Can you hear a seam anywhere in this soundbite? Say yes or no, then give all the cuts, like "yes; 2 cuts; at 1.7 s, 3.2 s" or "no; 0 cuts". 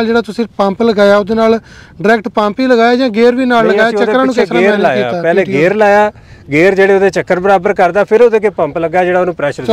no; 0 cuts